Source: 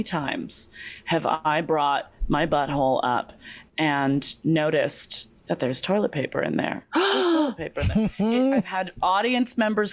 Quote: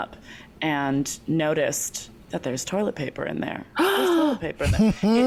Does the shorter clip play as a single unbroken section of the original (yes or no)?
yes